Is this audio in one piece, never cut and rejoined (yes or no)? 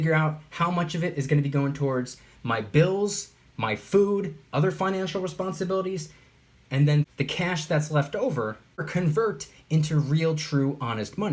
no